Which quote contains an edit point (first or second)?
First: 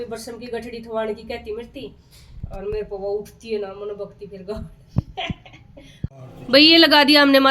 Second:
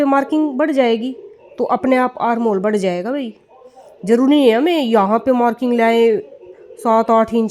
first